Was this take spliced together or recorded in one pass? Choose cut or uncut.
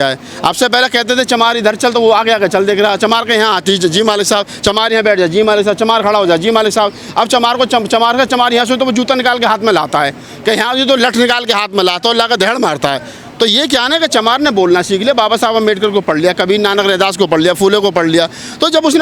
uncut